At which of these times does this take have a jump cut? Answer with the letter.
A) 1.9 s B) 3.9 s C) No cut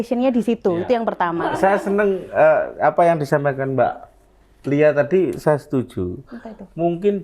A